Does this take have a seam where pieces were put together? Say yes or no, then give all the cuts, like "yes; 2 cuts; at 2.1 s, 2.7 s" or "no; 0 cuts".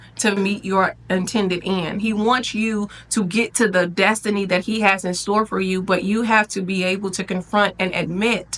no; 0 cuts